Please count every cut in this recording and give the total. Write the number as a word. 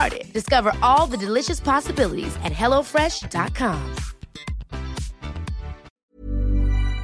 one